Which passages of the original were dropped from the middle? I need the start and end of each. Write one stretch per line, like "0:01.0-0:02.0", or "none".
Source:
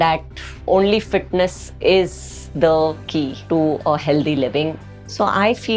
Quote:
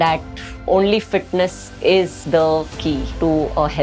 0:02.2-0:02.5

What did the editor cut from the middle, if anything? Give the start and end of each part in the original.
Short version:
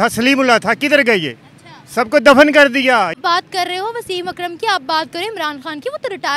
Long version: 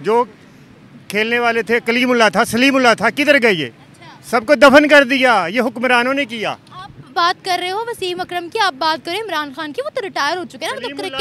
0:05.5-0:07.1

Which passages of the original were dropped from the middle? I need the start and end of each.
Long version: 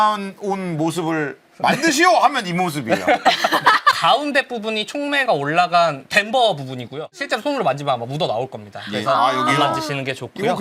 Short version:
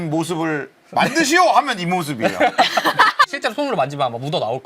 0:04.0-0:07.2

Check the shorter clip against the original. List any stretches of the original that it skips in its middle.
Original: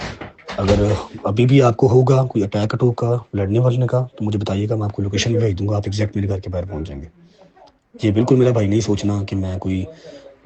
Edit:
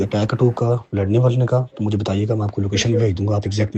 none

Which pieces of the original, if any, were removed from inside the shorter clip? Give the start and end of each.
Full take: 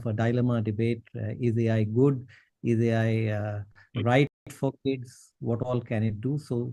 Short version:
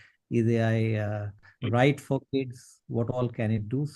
0:04.3-0:04.5

